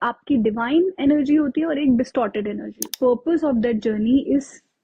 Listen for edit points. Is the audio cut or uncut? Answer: cut